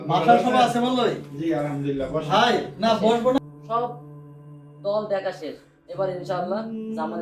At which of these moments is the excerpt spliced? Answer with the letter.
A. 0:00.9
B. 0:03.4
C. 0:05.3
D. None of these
B